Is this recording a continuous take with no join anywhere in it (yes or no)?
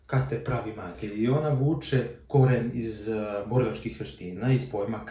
no